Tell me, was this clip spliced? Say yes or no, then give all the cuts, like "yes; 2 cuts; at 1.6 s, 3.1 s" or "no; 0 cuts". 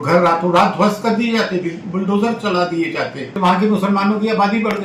yes; 1 cut; at 3.4 s